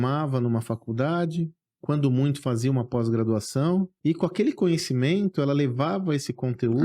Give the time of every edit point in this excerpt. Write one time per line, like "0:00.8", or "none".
0:03.9